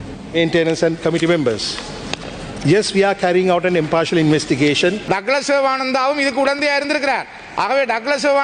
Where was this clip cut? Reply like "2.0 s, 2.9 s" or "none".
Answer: 5.0 s